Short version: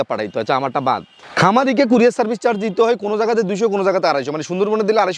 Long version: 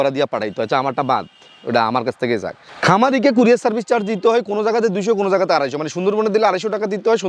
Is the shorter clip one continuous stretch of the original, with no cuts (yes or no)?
no